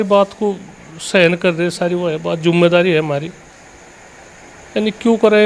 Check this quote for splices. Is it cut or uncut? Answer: uncut